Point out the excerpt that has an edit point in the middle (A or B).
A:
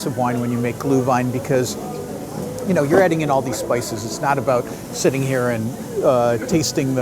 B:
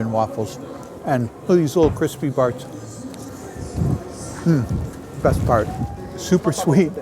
B